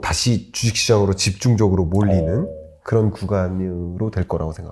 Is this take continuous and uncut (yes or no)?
yes